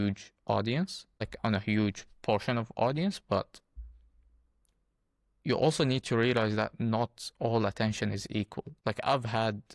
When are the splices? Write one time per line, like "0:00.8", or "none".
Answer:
none